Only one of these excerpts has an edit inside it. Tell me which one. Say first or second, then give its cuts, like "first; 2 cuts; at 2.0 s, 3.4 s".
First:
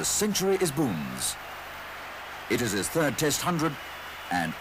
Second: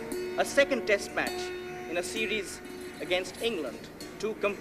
second; 1 cut; at 2.3 s